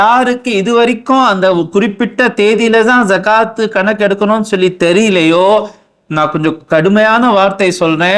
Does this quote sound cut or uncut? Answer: uncut